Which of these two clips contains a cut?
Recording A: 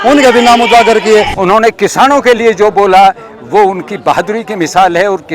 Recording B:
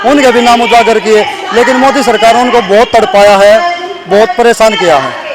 A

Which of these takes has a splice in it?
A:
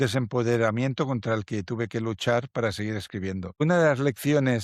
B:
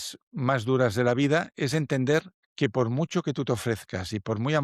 A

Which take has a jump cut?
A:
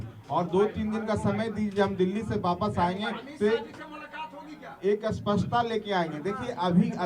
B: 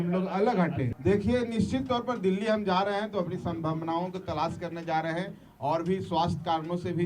B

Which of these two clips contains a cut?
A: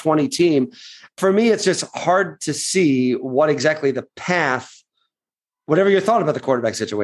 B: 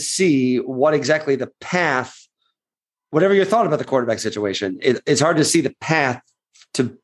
A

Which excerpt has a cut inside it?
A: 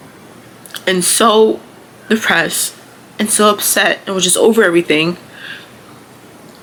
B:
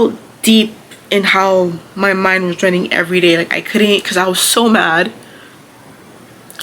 B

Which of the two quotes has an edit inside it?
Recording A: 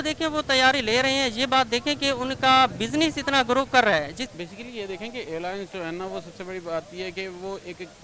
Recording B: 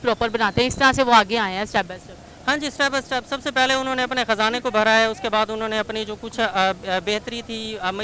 A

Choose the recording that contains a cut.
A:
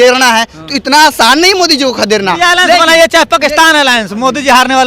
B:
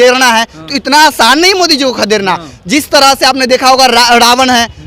A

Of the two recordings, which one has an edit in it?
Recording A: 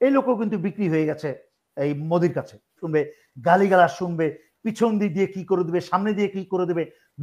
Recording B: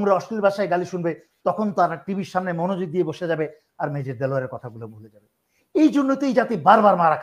A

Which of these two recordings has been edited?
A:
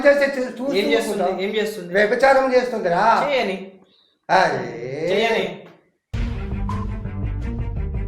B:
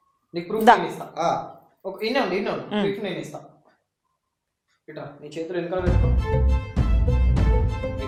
A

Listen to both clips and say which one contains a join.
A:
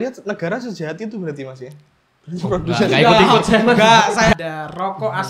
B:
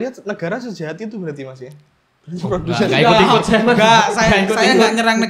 A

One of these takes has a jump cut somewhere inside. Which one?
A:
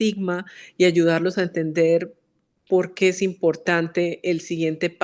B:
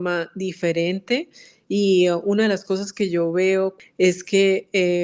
B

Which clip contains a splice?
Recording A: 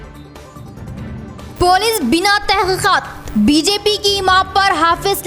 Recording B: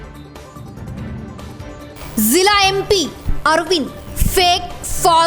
A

